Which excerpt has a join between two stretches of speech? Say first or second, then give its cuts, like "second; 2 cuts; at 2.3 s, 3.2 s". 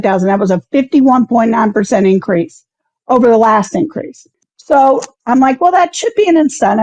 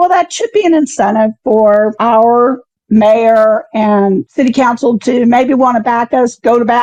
first; 1 cut; at 4.4 s